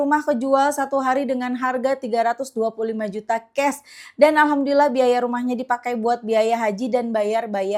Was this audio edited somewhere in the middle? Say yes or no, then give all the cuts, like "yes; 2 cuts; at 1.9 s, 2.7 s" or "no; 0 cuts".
no; 0 cuts